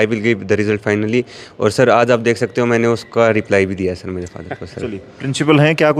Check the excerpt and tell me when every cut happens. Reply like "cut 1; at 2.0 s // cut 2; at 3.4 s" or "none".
none